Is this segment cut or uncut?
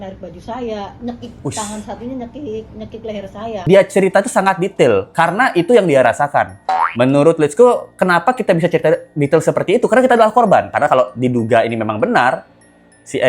cut